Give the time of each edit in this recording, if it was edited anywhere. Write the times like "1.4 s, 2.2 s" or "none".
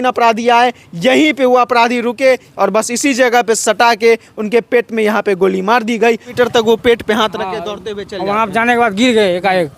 2.5 s, 6.3 s

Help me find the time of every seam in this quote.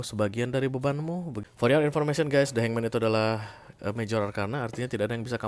1.3 s

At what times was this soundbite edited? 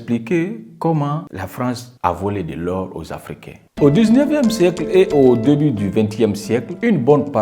3.5 s

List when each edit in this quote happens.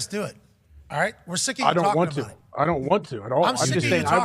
none

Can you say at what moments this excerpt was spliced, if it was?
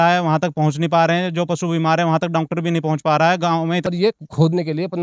3.8 s

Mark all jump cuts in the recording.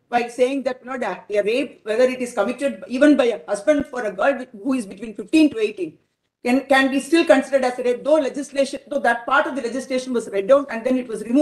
none

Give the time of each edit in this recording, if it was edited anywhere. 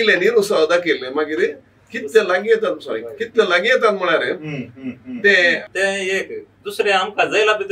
5.7 s

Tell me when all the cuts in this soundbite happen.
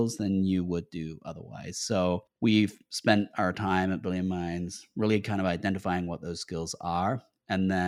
2.3 s

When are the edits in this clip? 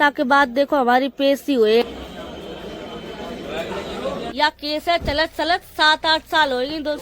4.3 s

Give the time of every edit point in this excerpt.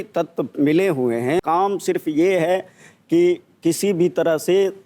1.4 s

